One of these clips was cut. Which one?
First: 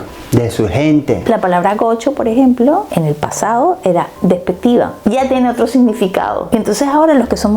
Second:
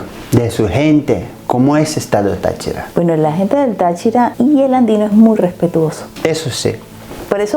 first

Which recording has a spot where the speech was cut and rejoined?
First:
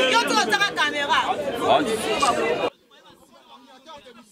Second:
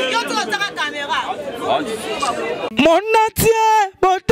first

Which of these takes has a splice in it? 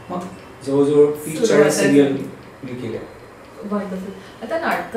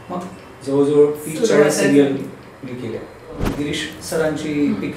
second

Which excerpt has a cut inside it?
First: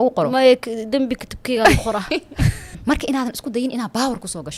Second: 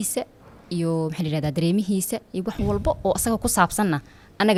first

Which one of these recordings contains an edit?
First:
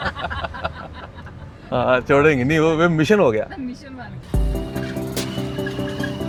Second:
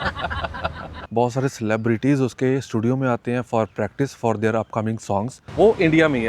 second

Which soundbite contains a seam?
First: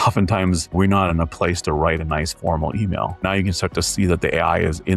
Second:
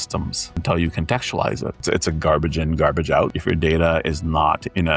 second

